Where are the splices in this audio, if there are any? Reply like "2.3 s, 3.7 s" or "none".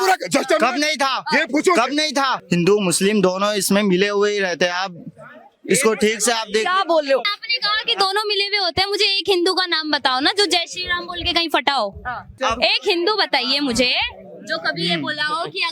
2.4 s, 7.3 s, 12.3 s